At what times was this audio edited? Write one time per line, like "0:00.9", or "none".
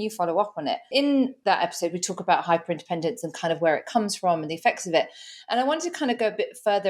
0:01.2